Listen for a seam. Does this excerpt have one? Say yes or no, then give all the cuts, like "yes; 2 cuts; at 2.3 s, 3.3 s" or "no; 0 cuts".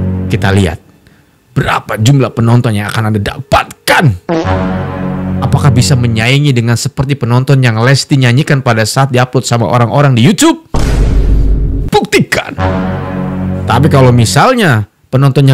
no; 0 cuts